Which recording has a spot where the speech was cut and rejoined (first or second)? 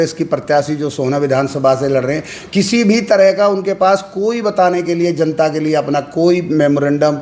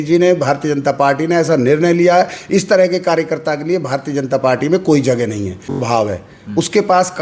second